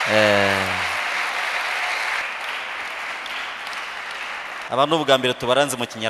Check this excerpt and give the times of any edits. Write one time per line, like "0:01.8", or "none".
0:02.2